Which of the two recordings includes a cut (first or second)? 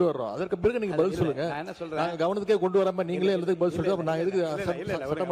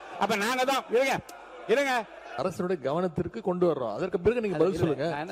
second